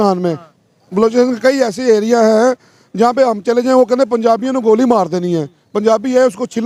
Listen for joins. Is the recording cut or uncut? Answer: uncut